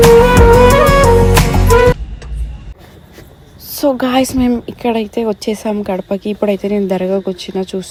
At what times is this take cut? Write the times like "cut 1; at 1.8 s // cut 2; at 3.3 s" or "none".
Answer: none